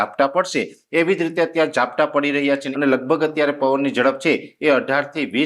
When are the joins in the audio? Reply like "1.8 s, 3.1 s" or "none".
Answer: 2.7 s